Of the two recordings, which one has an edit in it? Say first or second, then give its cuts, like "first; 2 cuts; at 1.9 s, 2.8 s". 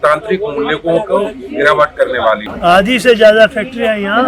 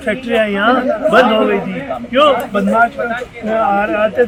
first; 1 cut; at 2.5 s